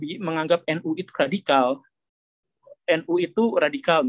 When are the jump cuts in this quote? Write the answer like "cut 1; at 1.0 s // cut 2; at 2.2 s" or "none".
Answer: cut 1; at 2.7 s